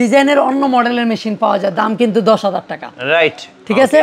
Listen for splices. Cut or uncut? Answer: uncut